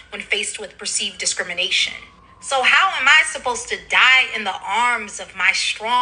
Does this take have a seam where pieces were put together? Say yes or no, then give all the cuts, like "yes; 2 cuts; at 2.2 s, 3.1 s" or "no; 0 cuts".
yes; 1 cut; at 3.0 s